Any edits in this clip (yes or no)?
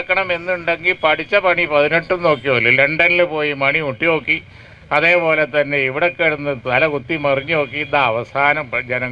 no